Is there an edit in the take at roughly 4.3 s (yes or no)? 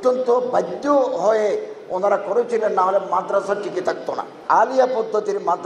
yes